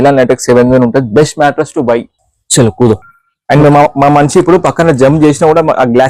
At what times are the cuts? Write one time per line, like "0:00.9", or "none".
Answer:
0:02.2